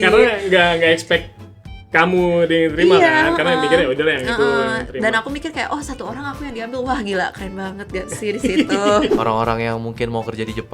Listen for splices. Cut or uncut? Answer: cut